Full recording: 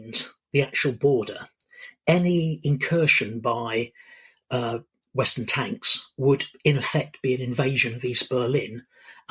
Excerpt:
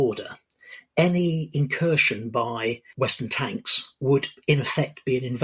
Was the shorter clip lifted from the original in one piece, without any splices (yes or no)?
no